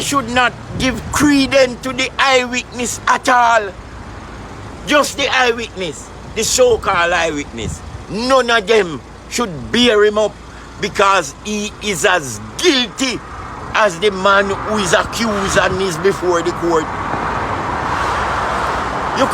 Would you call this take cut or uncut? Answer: uncut